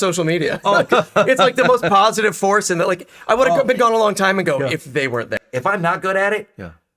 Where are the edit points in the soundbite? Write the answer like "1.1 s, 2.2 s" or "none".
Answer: 5.4 s